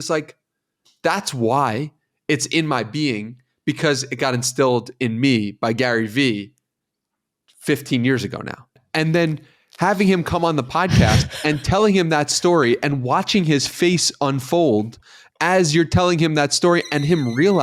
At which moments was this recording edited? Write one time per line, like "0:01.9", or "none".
0:08.8